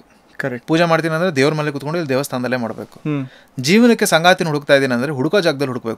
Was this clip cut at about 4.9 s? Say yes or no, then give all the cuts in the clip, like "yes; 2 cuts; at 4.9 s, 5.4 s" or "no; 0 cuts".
no; 0 cuts